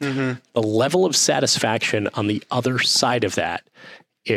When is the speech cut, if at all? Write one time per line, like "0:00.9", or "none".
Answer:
none